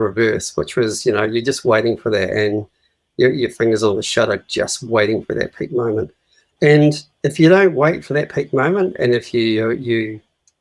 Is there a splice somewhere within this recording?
yes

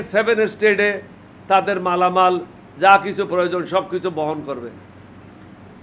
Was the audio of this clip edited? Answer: no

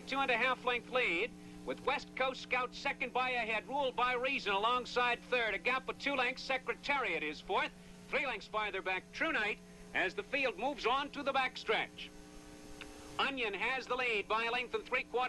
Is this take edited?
no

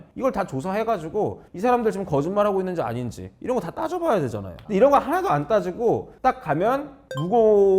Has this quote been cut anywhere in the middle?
yes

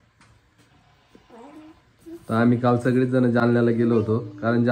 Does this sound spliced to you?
no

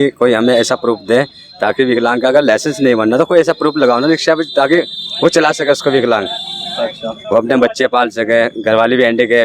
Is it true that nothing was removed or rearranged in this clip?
yes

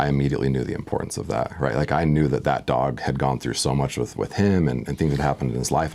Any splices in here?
no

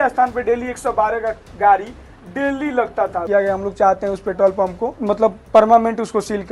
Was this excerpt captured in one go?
no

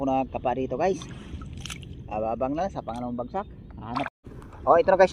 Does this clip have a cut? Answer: yes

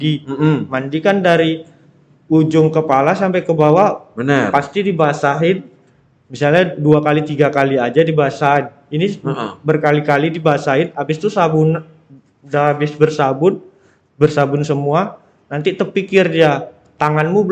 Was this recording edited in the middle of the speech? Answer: no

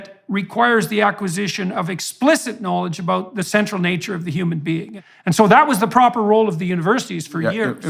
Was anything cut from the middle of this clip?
yes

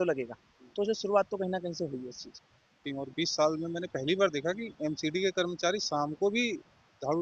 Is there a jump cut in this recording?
yes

